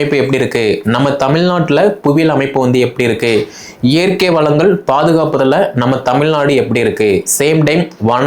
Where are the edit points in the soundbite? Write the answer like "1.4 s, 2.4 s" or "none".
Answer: none